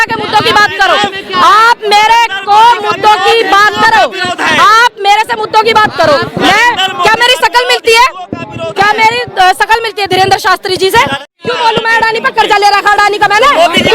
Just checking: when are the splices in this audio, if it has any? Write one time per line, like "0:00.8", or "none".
0:11.3